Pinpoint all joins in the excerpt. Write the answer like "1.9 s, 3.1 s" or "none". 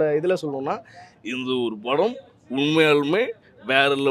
none